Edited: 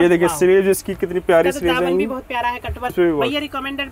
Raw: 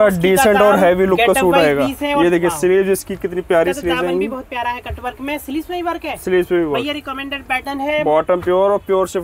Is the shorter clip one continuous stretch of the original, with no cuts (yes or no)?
no